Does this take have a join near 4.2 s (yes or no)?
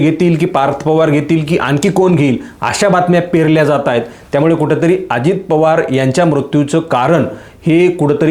no